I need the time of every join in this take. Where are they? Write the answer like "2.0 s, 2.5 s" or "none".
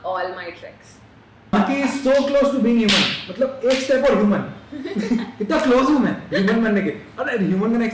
1.5 s